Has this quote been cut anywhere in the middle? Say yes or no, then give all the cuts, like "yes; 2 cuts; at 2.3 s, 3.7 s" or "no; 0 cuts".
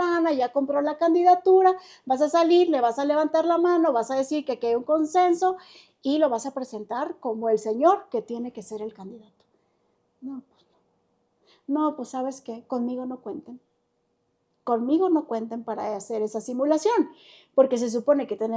no; 0 cuts